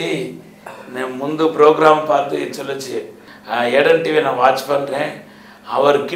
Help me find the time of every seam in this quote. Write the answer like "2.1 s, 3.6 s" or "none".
3.3 s